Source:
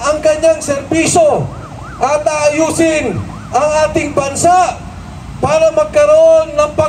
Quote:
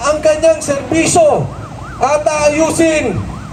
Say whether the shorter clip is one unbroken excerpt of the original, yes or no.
yes